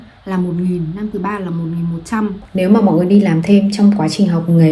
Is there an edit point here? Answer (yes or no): yes